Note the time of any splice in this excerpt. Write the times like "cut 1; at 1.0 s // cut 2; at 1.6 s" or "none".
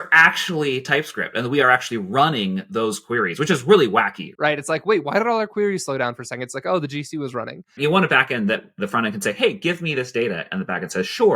cut 1; at 4.2 s // cut 2; at 7.8 s